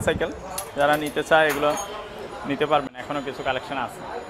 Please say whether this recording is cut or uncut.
uncut